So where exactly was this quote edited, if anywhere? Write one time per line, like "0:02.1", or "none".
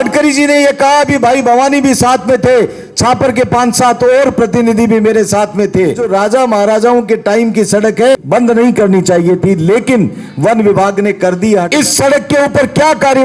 0:06.0
0:08.2
0:11.7